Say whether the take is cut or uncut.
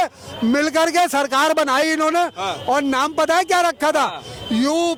uncut